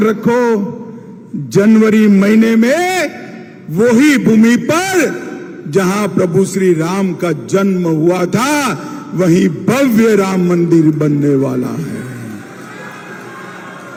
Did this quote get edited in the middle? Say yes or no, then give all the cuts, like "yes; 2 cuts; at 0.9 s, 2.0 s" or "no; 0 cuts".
no; 0 cuts